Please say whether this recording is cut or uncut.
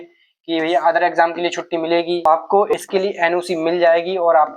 cut